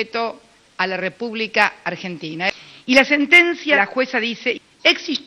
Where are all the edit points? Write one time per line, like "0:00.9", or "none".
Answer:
0:02.5
0:03.8